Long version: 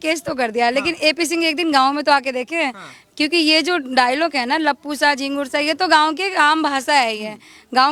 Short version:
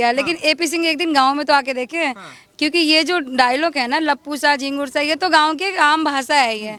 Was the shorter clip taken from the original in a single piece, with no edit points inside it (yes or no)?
yes